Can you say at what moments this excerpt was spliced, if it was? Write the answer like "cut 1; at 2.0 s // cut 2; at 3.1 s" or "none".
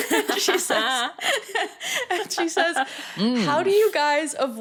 none